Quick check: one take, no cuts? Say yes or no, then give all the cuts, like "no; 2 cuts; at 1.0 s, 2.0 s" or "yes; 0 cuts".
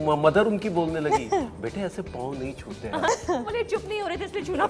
no; 1 cut; at 3.1 s